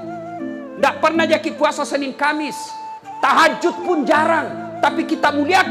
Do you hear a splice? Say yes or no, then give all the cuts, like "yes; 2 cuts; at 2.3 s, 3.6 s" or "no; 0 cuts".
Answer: no; 0 cuts